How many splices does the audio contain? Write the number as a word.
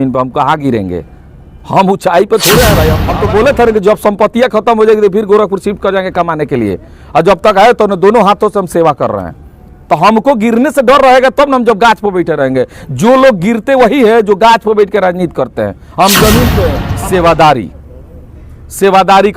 two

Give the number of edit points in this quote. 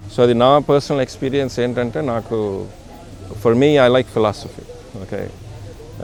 zero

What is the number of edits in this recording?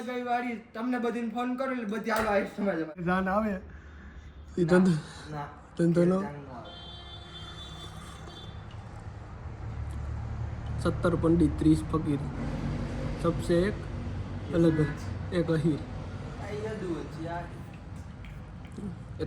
one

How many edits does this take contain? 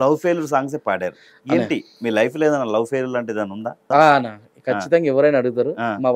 one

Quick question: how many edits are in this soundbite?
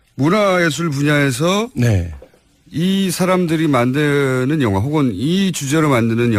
one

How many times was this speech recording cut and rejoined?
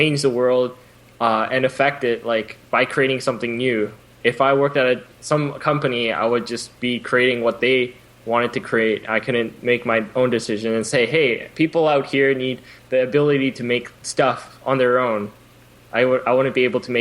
two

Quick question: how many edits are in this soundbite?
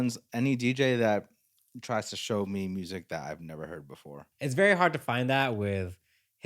one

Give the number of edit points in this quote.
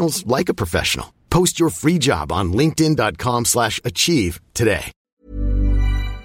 one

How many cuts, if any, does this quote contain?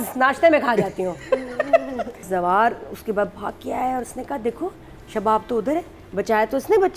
one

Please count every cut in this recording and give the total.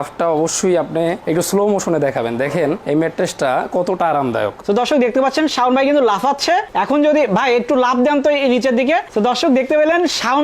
zero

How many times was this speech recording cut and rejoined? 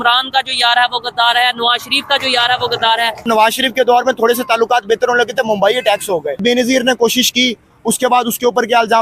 two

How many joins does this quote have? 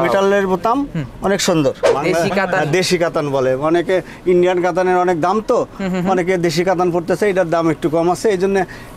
one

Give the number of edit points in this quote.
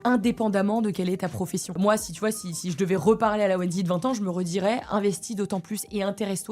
one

